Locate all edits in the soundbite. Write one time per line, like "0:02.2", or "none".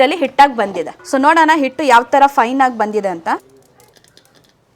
0:00.9
0:03.4